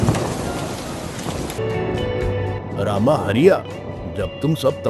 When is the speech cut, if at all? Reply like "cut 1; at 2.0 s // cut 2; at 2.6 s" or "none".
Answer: cut 1; at 1.6 s

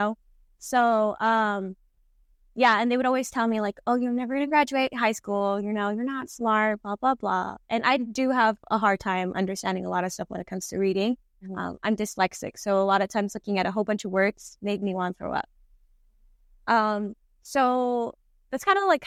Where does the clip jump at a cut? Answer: none

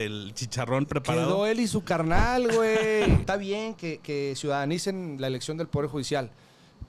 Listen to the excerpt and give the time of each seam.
cut 1; at 3.2 s

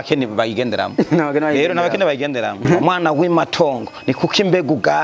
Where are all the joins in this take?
cut 1; at 2.7 s

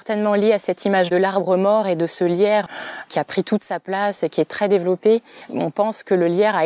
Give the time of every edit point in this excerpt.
cut 1; at 1.1 s // cut 2; at 2.7 s

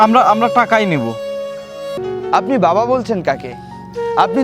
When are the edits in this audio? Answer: cut 1; at 2.0 s

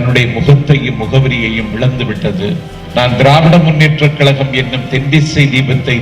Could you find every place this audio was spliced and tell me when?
cut 1; at 2.7 s

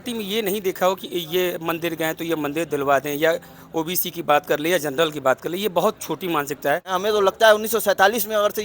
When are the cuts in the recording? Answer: cut 1; at 6.9 s

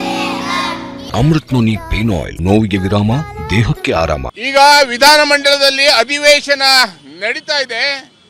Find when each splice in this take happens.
cut 1; at 1.0 s // cut 2; at 2.3 s // cut 3; at 4.4 s

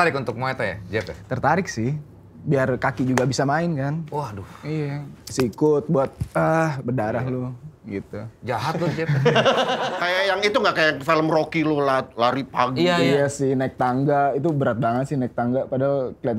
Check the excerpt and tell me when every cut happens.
cut 1; at 9.9 s

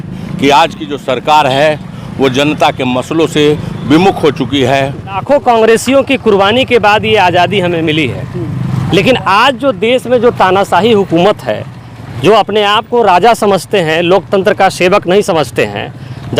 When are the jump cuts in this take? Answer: cut 1; at 5.2 s

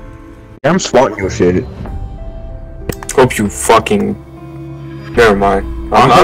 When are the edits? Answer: none

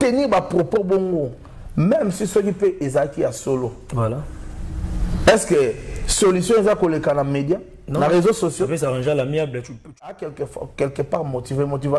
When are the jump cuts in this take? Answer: cut 1; at 10.1 s

